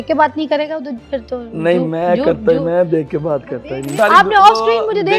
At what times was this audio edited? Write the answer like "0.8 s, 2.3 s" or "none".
3.9 s